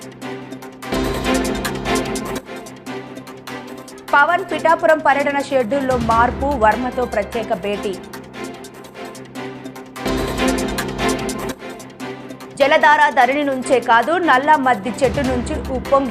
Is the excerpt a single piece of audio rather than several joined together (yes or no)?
no